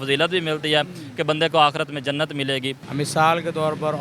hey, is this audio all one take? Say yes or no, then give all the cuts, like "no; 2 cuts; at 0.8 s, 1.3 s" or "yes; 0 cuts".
no; 1 cut; at 2.8 s